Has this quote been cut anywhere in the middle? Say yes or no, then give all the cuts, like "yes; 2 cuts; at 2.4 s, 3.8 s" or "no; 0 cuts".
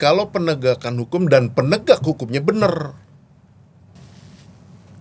yes; 1 cut; at 3.9 s